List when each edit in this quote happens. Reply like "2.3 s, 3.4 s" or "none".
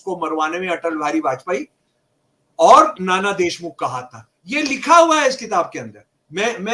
none